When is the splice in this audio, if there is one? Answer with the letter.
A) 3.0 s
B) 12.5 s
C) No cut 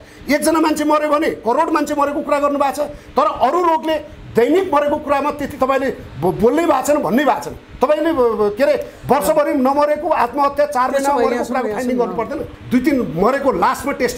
B